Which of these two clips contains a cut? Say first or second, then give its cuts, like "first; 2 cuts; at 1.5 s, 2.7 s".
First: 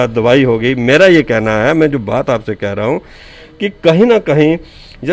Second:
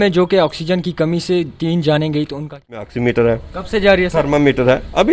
second; 1 cut; at 2.9 s